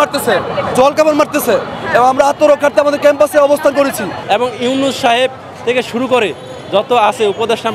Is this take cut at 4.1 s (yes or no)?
yes